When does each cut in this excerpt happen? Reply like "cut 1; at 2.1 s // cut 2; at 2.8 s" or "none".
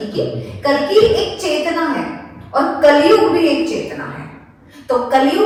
none